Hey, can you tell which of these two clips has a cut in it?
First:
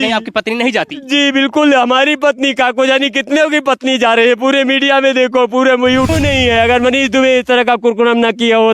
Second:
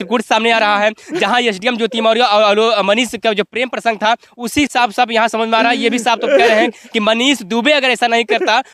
first; 1 cut; at 6.1 s

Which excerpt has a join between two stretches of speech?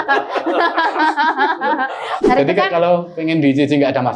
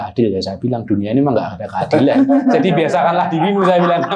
first; 1 cut; at 2.3 s

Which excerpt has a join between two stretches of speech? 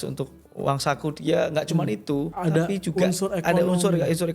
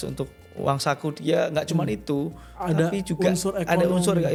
first; 1 cut; at 2.3 s

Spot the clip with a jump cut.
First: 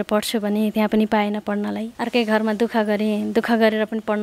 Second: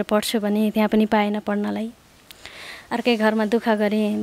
first; 1 cut; at 1.9 s

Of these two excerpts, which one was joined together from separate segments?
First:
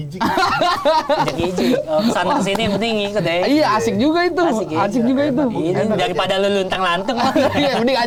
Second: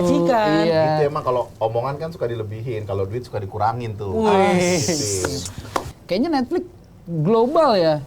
second; 1 cut; at 6.0 s

